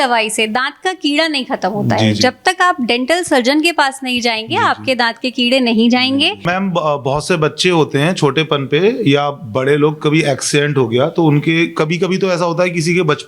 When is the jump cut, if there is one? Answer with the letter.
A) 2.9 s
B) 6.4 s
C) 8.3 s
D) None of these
B